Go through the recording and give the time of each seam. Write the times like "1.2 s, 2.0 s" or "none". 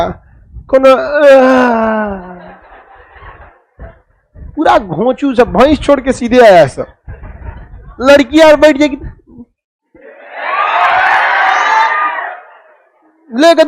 none